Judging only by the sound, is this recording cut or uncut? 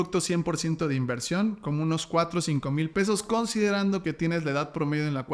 uncut